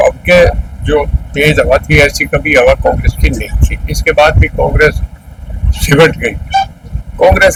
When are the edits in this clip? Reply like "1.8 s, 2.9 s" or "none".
none